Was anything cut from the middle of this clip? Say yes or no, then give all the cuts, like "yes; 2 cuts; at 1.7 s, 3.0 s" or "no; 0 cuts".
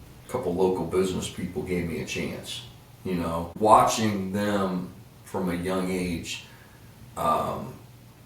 yes; 1 cut; at 3.5 s